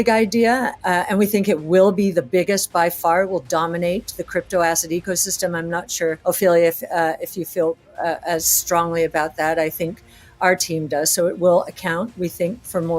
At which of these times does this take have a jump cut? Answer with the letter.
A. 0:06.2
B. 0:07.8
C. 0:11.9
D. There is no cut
A